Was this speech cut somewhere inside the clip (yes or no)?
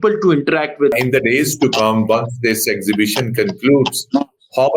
yes